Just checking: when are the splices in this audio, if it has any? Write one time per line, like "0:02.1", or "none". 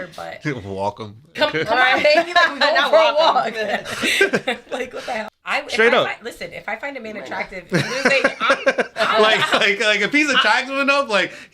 0:05.4